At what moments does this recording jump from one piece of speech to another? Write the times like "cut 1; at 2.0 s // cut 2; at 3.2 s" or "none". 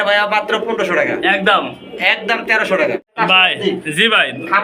cut 1; at 3.1 s

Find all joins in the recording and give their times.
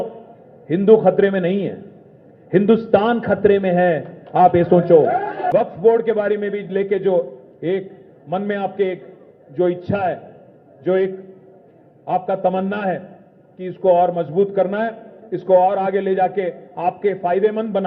cut 1; at 5.4 s

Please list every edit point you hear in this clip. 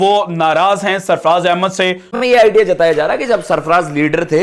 cut 1; at 2.1 s

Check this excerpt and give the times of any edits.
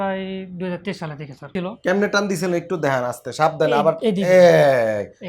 cut 1; at 1.5 s

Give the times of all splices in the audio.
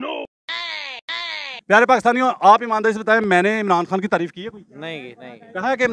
cut 1; at 1.5 s

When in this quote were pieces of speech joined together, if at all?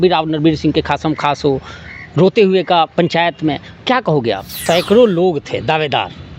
cut 1; at 4.5 s

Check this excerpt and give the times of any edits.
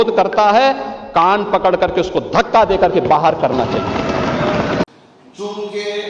cut 1; at 4.9 s

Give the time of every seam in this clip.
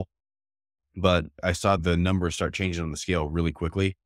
cut 1; at 1.7 s

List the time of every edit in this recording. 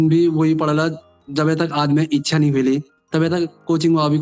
cut 1; at 3.0 s

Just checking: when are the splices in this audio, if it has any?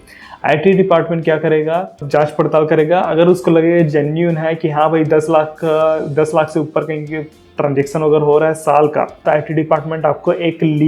cut 1; at 2.0 s // cut 2; at 9.2 s

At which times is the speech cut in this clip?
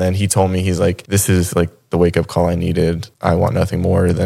cut 1; at 1.0 s // cut 2; at 3.1 s

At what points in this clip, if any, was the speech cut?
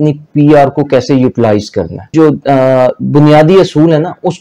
cut 1; at 2.1 s

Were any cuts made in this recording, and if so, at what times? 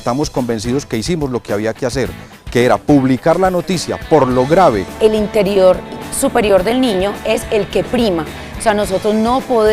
cut 1; at 4.9 s

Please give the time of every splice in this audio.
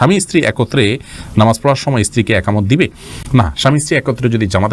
none

